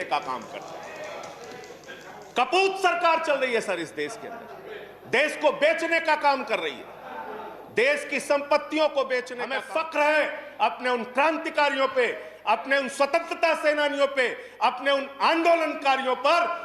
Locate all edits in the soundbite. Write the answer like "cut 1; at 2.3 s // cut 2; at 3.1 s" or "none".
cut 1; at 9.4 s